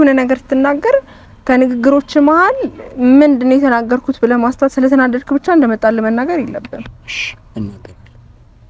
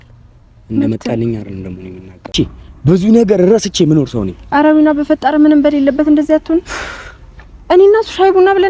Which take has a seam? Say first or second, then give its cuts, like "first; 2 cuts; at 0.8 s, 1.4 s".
second; 1 cut; at 2.3 s